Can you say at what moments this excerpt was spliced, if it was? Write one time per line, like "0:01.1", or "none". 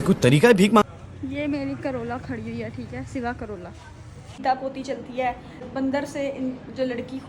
0:00.8
0:04.4